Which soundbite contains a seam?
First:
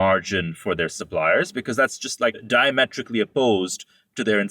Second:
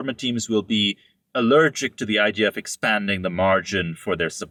first; 1 cut; at 2.4 s

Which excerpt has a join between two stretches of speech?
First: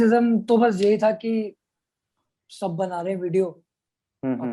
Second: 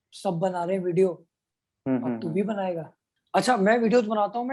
second; 1 cut; at 3.1 s

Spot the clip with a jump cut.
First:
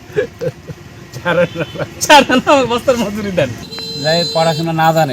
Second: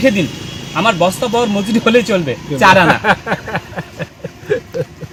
first; 1 cut; at 3.6 s

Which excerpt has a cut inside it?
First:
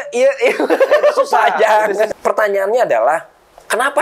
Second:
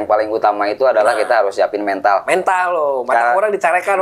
first; 1 cut; at 2.1 s

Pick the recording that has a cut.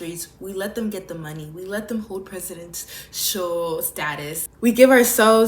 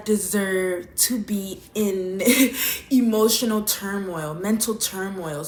first; 1 cut; at 4.4 s

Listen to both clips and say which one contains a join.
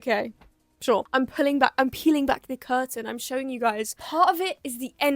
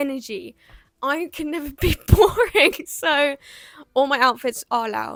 first; 2 cuts; at 1.0 s, 4.0 s

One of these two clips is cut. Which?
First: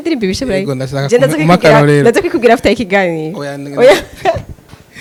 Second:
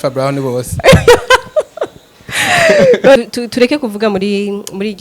second; 1 cut; at 3.2 s

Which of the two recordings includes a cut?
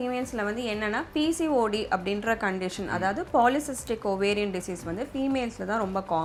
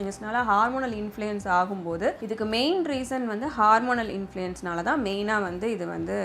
second; 1 cut; at 2.2 s

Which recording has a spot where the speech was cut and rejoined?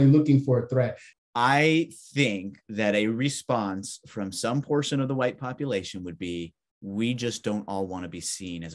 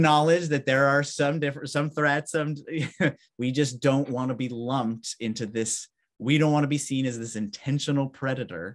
first; 1 cut; at 1.0 s

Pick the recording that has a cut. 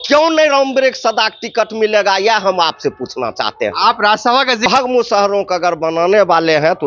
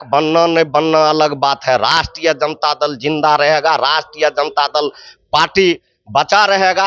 first; 1 cut; at 4.7 s

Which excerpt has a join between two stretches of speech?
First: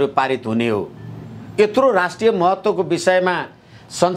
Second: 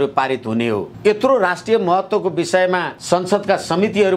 second; 2 cuts; at 0.9 s, 2.9 s

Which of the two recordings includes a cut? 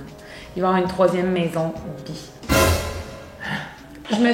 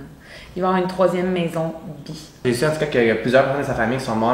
second; 1 cut; at 2.4 s

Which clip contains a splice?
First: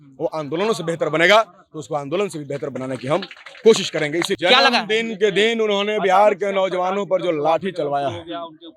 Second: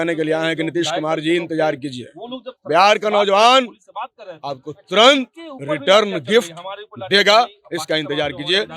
first; 1 cut; at 4.4 s

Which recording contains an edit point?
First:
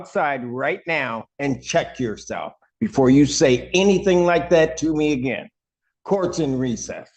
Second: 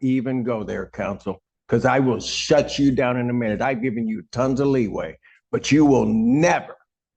second; 1 cut; at 1.5 s

